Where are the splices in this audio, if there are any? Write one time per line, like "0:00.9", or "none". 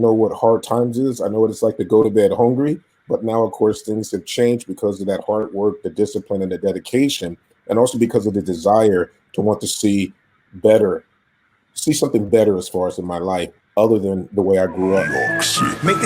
0:15.1